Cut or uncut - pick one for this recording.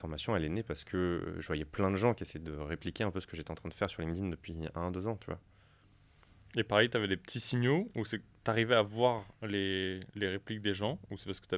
uncut